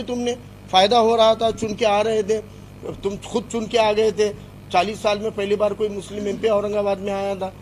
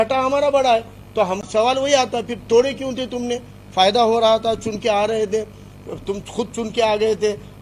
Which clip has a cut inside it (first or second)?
second